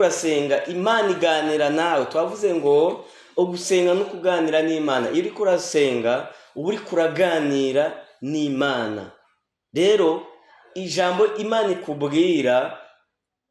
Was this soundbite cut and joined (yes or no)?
no